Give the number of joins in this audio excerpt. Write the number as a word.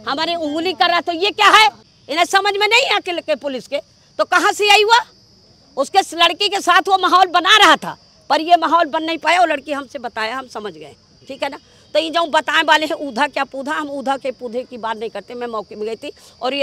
zero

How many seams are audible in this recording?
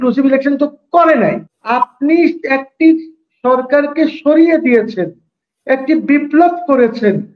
one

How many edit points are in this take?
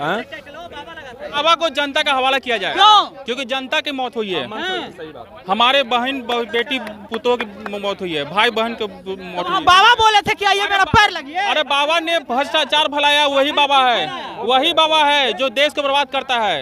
one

